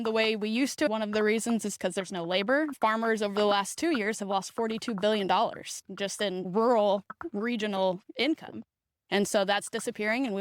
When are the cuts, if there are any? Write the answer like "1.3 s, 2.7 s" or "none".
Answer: 0.9 s, 2.7 s, 6.5 s